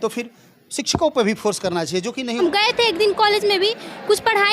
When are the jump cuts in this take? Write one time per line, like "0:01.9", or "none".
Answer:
0:02.4